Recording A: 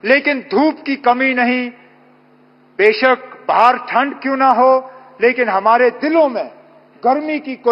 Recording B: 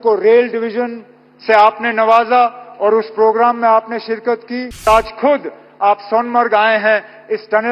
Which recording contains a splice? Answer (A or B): B